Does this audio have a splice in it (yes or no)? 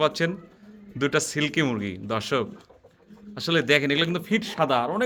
no